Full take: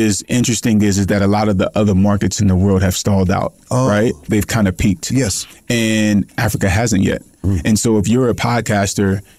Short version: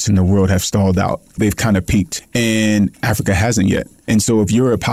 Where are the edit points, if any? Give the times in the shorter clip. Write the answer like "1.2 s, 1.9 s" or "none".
1.3 s, 2.1 s, 4.0 s